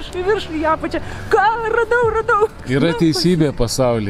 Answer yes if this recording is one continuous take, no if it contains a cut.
no